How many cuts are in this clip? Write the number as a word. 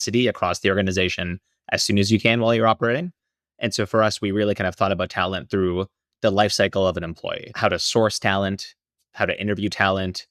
one